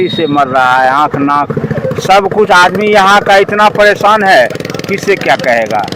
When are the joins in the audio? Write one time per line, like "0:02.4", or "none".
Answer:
none